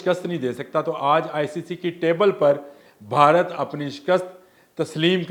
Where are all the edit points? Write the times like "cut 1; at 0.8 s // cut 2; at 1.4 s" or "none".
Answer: none